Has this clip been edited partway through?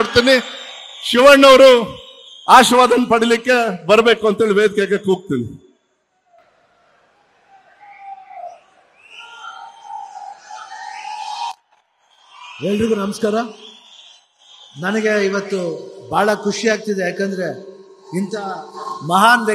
no; 0 cuts

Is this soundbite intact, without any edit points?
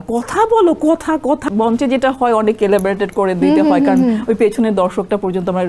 no; 1 cut; at 1.4 s

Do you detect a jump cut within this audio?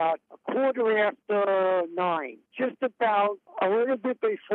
yes; 2 cuts; at 2.5 s, 3.4 s

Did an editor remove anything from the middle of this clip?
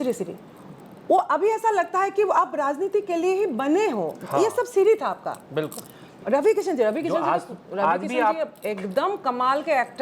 yes; 1 cut; at 6.2 s

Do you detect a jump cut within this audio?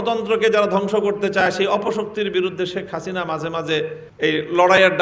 yes; 1 cut; at 4.0 s

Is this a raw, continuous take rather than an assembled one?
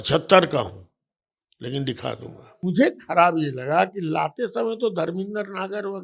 no; 1 cut; at 2.6 s

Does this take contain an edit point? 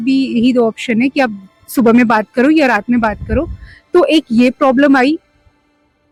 no; 0 cuts

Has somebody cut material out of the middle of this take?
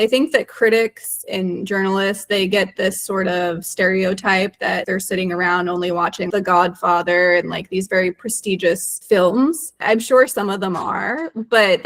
no; 0 cuts

